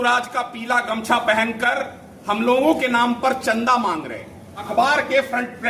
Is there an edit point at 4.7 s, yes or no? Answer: yes